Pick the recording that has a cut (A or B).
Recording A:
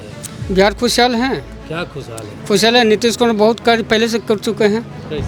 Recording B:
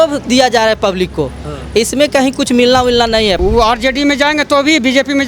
B